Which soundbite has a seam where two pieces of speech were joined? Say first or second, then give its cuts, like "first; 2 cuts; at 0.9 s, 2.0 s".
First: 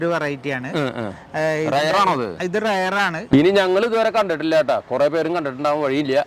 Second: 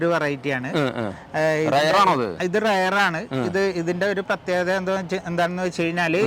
first; 1 cut; at 3.2 s